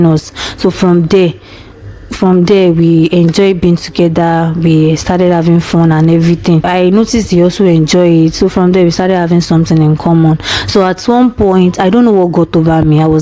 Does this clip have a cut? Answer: yes; 1 cut; at 6.6 s

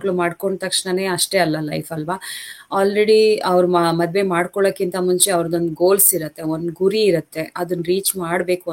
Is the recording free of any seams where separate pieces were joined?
yes; 0 cuts

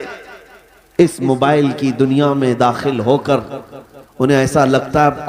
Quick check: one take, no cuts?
yes; 0 cuts

